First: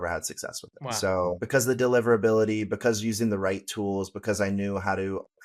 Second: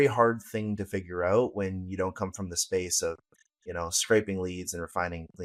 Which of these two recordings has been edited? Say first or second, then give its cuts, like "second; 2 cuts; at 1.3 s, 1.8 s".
first; 1 cut; at 1.4 s